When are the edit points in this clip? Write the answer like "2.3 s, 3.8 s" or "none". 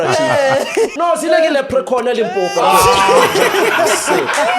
0.9 s